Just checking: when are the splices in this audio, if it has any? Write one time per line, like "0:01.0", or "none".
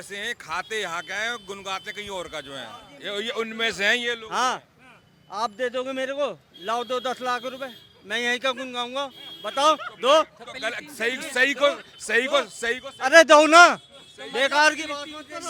none